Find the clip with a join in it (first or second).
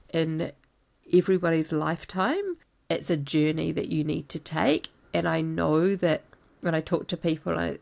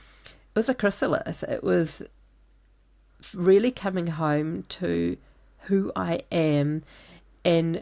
first